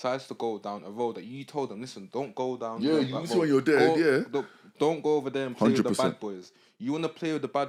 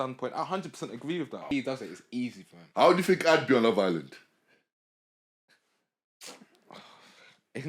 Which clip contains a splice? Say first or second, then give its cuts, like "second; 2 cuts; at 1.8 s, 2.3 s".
second; 1 cut; at 1.5 s